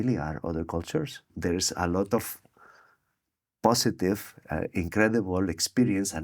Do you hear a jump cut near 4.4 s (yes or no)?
no